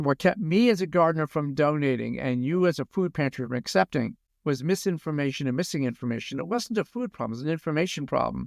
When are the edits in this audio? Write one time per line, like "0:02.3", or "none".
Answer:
0:04.2